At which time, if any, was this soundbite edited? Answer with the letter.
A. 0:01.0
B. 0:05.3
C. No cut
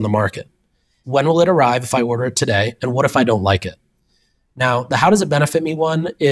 A